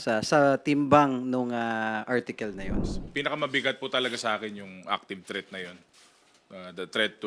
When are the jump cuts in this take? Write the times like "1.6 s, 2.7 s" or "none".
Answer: 2.8 s